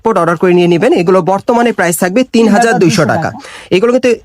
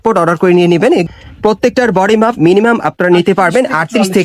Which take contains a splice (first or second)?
second